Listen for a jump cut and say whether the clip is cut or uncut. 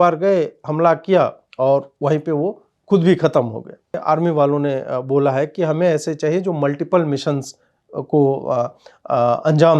cut